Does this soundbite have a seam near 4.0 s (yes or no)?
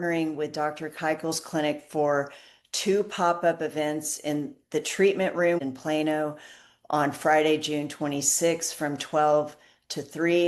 no